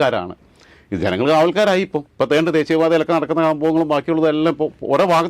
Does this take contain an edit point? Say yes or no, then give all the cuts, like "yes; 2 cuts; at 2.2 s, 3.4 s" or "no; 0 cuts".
no; 0 cuts